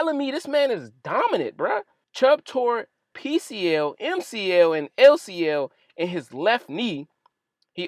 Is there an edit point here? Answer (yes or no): yes